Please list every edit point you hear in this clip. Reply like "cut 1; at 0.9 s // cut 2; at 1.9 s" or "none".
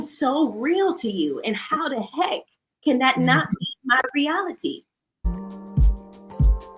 cut 1; at 5.3 s